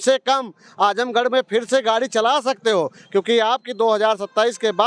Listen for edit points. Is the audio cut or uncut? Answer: uncut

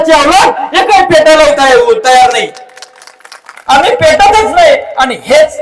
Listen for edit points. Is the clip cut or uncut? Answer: uncut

